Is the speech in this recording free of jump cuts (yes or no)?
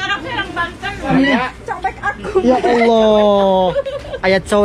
no